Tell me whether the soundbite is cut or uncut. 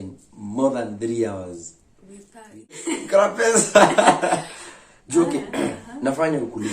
cut